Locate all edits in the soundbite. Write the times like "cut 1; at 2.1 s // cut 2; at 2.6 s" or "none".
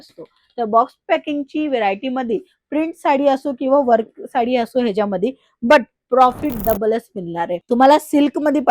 cut 1; at 7.6 s